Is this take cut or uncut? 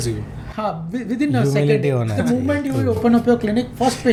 uncut